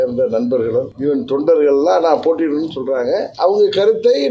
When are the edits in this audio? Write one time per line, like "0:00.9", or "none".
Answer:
0:00.9